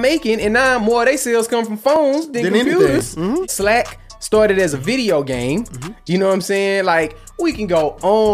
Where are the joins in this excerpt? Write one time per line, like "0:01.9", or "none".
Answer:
0:03.4